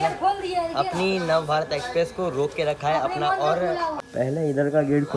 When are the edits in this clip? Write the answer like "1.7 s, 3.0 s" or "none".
4.0 s